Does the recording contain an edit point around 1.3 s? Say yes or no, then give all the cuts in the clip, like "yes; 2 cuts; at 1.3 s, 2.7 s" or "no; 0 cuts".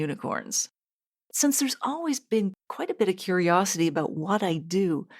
yes; 1 cut; at 1.3 s